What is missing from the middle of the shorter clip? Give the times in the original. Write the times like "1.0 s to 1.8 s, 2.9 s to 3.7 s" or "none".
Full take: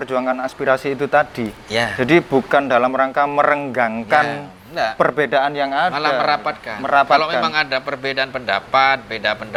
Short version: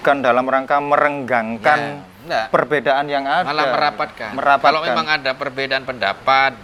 none